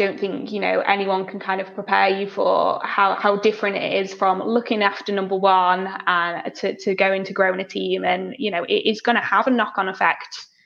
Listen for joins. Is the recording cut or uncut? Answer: uncut